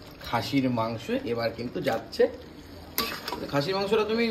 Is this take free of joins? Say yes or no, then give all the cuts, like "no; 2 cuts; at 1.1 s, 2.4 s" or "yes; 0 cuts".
yes; 0 cuts